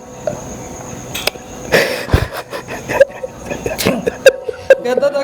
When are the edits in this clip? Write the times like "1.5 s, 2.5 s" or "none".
none